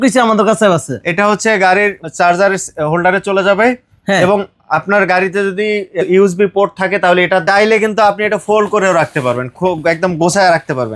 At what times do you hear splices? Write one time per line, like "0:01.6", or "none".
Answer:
0:07.4